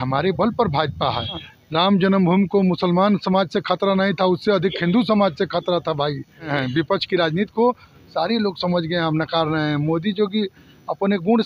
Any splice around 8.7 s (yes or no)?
no